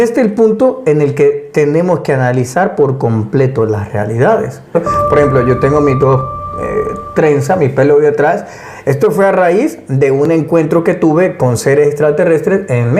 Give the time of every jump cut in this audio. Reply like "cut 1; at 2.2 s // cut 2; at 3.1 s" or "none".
cut 1; at 4.7 s